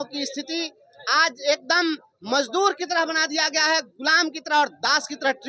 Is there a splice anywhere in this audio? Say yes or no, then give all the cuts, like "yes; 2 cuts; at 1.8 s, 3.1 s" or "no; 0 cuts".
no; 0 cuts